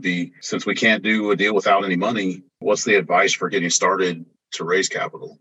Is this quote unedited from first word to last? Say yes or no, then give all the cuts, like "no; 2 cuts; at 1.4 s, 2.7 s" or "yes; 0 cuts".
yes; 0 cuts